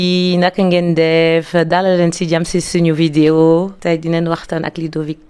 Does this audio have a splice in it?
yes; 1 cut; at 3.7 s

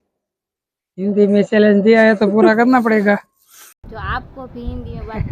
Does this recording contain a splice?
yes; 1 cut; at 3.8 s

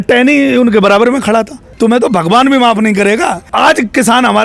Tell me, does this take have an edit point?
yes; 2 cuts; at 1.6 s, 3.4 s

